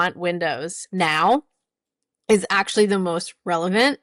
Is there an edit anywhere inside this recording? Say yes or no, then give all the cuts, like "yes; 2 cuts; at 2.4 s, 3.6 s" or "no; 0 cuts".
no; 0 cuts